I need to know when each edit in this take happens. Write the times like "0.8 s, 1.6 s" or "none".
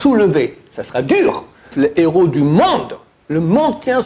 1.7 s